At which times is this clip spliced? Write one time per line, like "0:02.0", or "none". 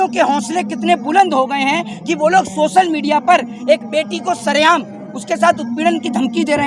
none